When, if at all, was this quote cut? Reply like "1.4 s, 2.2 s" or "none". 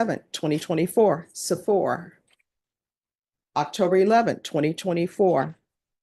none